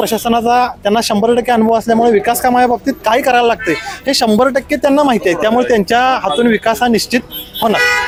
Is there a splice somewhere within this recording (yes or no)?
no